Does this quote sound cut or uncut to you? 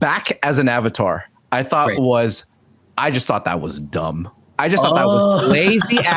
uncut